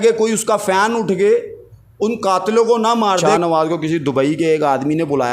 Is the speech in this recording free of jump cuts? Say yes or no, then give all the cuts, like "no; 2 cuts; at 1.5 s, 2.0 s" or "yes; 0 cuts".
no; 1 cut; at 3.3 s